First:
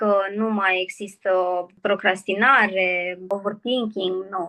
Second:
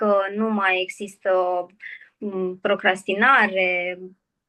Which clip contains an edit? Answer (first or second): first